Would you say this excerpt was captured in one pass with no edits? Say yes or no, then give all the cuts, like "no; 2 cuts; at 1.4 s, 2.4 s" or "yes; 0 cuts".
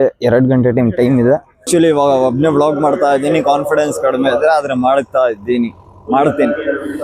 no; 1 cut; at 1.6 s